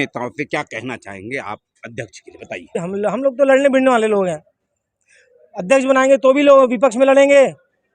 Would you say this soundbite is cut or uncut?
cut